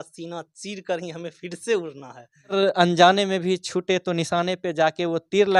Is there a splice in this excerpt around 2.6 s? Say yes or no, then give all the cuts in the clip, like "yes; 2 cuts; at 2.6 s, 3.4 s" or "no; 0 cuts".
yes; 1 cut; at 2.6 s